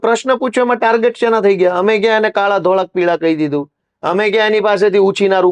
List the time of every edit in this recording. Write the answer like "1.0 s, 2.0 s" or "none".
none